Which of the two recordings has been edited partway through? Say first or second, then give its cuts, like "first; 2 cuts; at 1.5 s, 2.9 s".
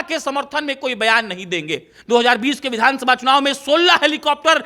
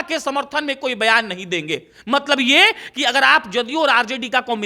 first; 1 cut; at 1.9 s